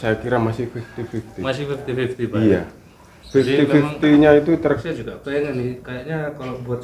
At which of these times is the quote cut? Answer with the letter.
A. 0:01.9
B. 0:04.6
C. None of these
B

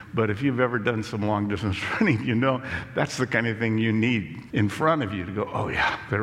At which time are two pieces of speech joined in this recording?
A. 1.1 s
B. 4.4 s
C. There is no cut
B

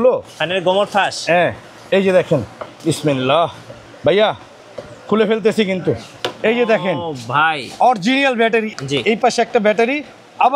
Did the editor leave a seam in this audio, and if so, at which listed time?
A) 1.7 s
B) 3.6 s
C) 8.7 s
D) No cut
C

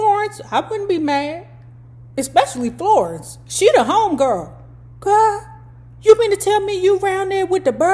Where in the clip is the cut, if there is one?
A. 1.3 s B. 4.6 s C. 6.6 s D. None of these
D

